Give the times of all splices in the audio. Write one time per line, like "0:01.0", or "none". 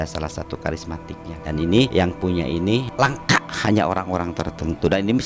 0:01.3
0:01.9
0:02.9